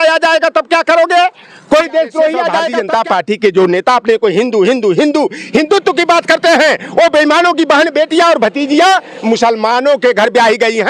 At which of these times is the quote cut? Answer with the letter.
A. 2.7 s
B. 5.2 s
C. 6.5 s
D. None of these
A